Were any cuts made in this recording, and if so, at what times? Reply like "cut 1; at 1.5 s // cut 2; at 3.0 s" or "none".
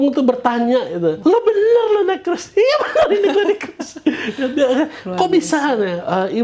cut 1; at 1.2 s